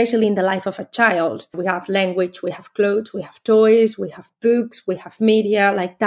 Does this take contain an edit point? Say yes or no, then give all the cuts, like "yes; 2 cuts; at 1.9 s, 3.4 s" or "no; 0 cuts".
yes; 1 cut; at 1.5 s